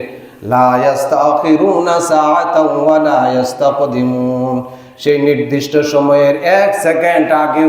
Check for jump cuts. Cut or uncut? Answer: cut